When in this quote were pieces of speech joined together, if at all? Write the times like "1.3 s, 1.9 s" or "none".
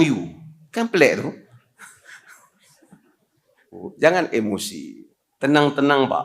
3.8 s